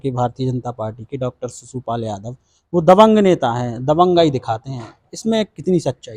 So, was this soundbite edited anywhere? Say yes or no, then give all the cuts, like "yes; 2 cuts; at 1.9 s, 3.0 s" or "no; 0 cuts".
no; 0 cuts